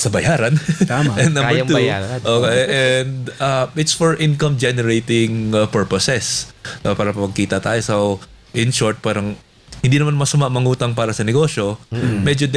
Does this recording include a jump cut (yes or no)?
no